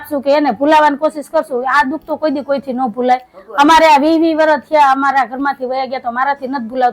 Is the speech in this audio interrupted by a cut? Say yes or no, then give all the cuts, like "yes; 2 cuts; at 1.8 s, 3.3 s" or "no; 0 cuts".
no; 0 cuts